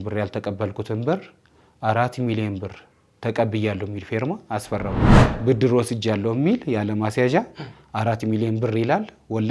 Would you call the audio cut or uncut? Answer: cut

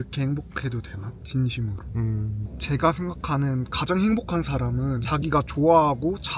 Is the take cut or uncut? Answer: uncut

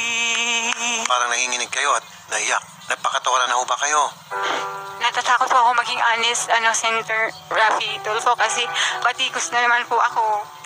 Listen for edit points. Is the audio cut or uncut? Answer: cut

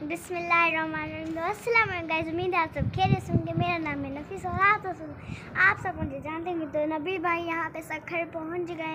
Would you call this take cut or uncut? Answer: uncut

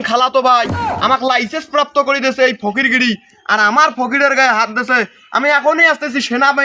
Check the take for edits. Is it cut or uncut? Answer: uncut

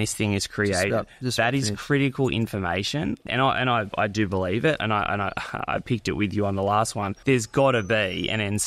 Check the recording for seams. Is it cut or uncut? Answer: cut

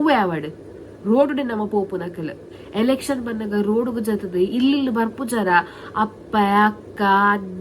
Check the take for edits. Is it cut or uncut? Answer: cut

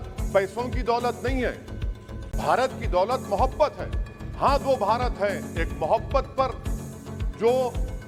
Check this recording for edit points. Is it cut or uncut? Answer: uncut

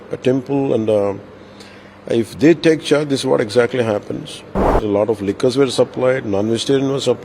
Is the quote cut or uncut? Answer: cut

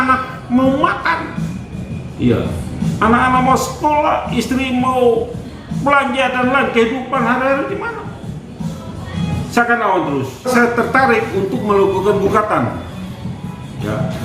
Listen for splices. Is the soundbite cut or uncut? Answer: cut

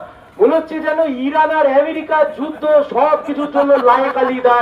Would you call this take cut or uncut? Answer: uncut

